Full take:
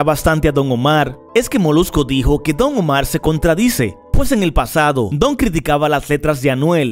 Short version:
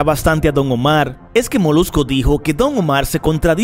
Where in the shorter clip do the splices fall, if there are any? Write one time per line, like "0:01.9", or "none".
none